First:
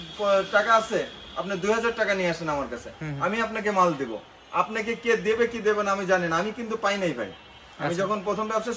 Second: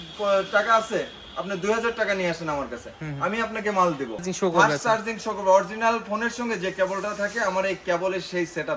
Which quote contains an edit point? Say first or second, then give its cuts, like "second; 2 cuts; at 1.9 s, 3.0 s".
second; 1 cut; at 4.3 s